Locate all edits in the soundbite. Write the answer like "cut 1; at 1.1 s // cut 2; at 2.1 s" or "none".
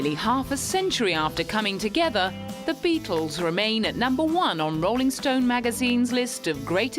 cut 1; at 4.5 s